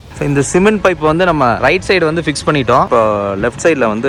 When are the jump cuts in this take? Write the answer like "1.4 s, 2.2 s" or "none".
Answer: none